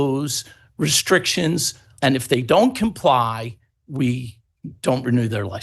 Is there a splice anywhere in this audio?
yes; 1 cut; at 1.9 s

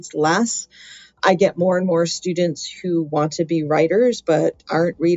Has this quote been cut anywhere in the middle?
yes; 1 cut; at 1.2 s

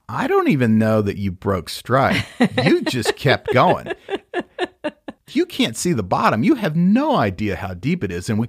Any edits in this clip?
yes; 1 cut; at 5.1 s

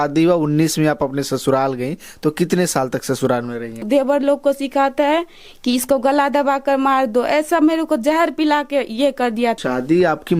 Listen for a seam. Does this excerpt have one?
yes; 2 cuts; at 3.8 s, 9.6 s

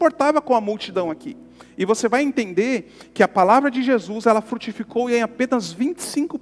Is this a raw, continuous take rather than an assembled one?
yes; 0 cuts

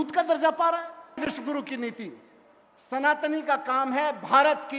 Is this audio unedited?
yes; 0 cuts

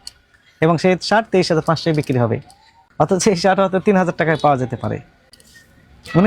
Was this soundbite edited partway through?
no; 0 cuts

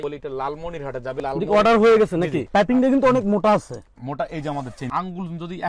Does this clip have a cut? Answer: yes; 2 cuts; at 2.4 s, 4.9 s

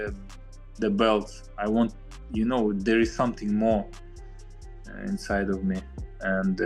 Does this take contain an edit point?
no; 0 cuts

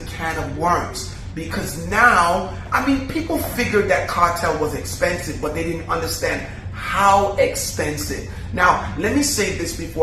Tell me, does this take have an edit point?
no; 0 cuts

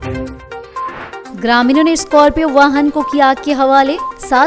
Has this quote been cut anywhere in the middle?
yes; 1 cut; at 1.2 s

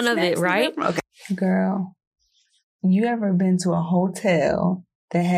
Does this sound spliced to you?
yes; 1 cut; at 1.1 s

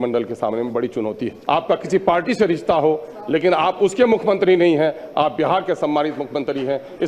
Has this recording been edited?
yes; 1 cut; at 1.3 s

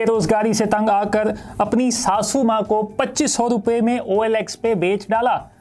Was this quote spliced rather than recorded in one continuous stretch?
no; 0 cuts

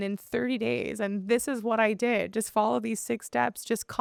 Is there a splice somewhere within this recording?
no; 0 cuts

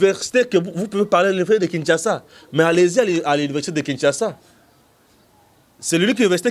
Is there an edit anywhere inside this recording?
no; 0 cuts

